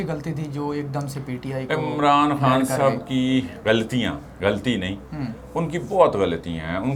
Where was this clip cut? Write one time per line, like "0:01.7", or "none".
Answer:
none